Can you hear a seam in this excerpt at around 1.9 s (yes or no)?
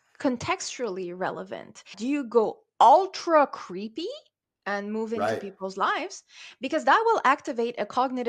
yes